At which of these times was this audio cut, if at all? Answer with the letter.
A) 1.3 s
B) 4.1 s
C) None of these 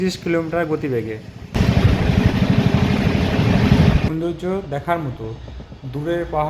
B